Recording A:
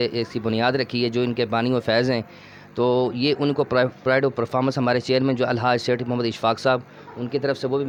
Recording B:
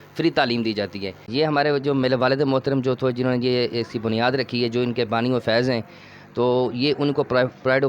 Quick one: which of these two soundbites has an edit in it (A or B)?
B